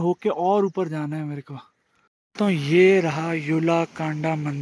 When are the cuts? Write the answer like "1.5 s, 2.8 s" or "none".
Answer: 2.2 s